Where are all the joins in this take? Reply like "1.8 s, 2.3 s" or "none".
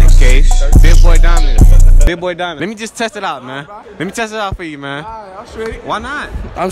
2.6 s